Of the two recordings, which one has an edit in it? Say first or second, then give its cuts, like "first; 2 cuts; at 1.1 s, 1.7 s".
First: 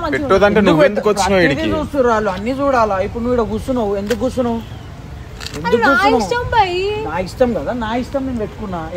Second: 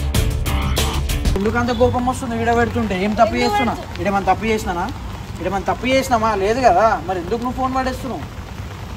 second; 1 cut; at 1.4 s